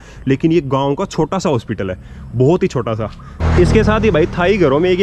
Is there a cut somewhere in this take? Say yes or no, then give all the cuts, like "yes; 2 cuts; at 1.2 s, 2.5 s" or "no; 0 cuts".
yes; 1 cut; at 3.2 s